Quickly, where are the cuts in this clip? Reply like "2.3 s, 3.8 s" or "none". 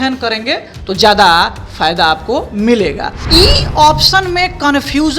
3.1 s